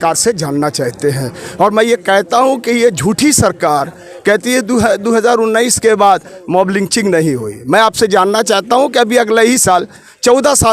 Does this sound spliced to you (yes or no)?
no